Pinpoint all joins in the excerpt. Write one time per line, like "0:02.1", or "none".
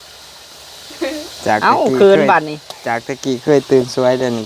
none